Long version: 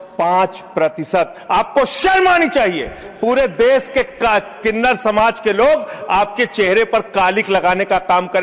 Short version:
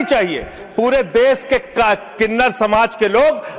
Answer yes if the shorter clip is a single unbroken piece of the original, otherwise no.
yes